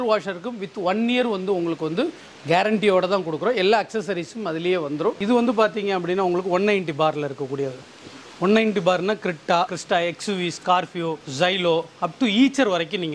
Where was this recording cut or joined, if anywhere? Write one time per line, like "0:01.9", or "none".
0:05.2
0:09.7
0:11.2